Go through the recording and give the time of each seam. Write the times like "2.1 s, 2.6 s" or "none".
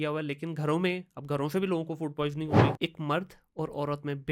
2.7 s